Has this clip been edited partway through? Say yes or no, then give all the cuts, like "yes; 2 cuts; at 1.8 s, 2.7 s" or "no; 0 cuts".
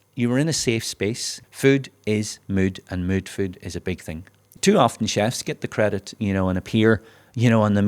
yes; 2 cuts; at 1.3 s, 4.5 s